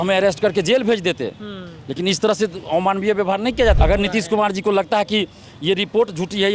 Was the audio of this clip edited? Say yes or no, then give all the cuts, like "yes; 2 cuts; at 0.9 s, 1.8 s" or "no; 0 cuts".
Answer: yes; 1 cut; at 3.8 s